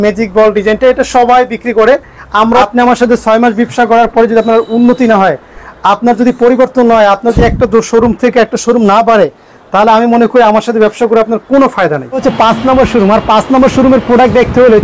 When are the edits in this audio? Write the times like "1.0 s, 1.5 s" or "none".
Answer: 2.6 s, 12.2 s

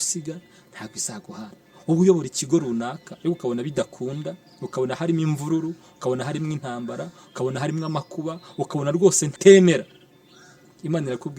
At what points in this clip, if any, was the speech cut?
9.3 s

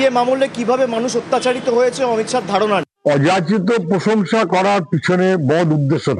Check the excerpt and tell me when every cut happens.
2.9 s

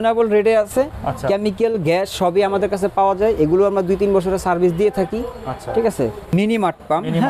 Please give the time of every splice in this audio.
6.3 s

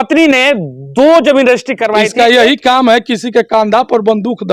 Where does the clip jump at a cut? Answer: 2.0 s

